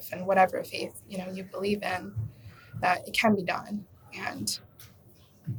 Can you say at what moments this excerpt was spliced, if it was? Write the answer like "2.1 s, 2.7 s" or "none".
none